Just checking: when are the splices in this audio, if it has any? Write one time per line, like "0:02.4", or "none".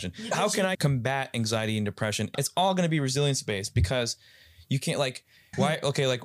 0:00.8
0:02.3
0:05.4